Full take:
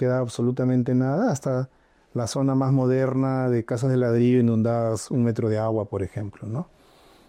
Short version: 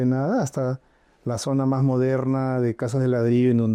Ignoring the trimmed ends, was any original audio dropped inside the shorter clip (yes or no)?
no